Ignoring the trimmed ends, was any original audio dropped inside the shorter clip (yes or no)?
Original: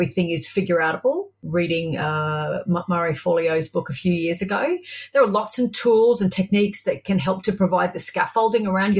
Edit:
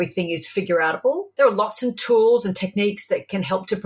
yes